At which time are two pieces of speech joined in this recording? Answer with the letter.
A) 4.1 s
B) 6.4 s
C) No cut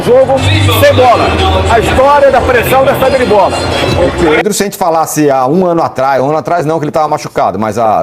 A